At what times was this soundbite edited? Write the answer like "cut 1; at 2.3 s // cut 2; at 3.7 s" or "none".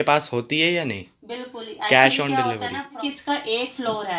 cut 1; at 2.9 s